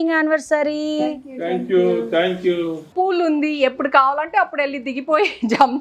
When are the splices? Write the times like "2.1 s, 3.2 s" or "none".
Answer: 2.9 s